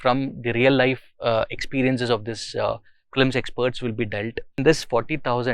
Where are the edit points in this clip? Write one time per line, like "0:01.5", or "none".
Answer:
0:04.6